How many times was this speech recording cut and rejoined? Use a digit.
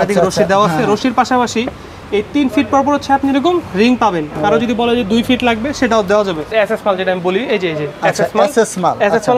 1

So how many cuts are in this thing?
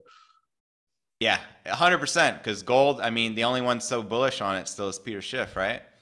0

